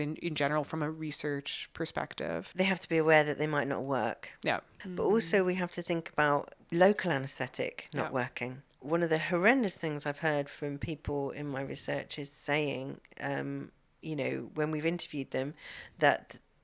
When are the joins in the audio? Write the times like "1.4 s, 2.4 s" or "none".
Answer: 2.5 s, 4.8 s, 6.6 s, 8.7 s